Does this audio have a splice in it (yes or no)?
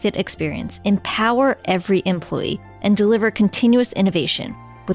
no